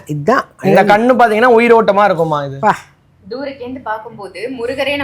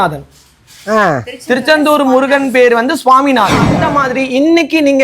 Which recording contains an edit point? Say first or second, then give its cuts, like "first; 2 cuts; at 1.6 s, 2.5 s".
second; 1 cut; at 3.8 s